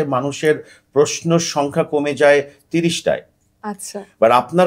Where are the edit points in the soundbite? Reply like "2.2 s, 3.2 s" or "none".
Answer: none